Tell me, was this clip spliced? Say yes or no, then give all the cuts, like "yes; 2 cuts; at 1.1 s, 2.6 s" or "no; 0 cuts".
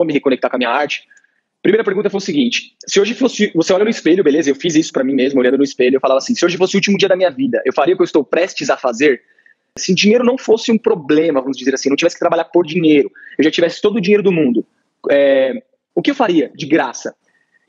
yes; 1 cut; at 9.8 s